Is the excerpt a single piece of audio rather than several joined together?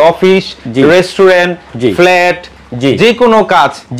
yes; 0 cuts

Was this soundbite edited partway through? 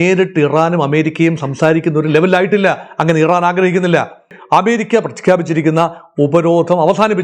yes; 1 cut; at 4.4 s

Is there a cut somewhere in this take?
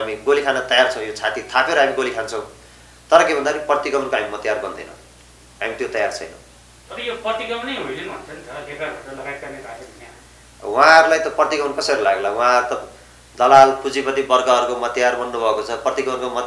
no; 0 cuts

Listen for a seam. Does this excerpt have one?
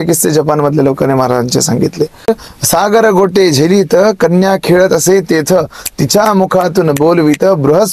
yes; 1 cut; at 2.3 s

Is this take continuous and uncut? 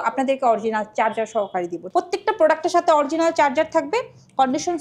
no; 1 cut; at 1.8 s

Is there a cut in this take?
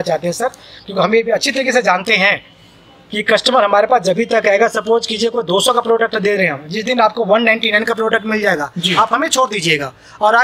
no; 0 cuts

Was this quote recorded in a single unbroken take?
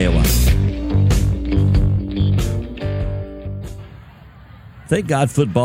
no; 1 cut; at 3.7 s

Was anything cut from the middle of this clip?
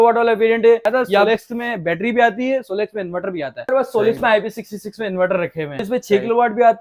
yes; 3 cuts; at 1.1 s, 3.6 s, 5.8 s

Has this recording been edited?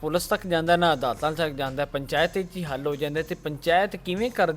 no; 0 cuts

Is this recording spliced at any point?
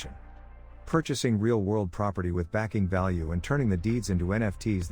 no; 0 cuts

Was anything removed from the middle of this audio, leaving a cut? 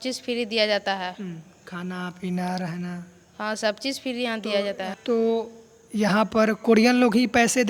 no; 0 cuts

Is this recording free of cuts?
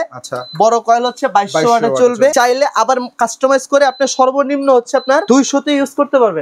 no; 2 cuts; at 2.3 s, 5.2 s

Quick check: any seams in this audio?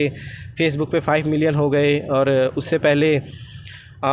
no; 0 cuts

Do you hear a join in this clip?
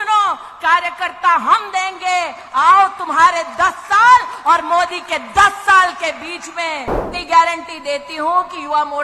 yes; 1 cut; at 7.1 s

